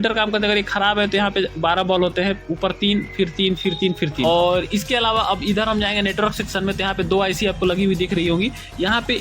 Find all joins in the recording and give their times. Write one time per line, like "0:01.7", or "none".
0:04.2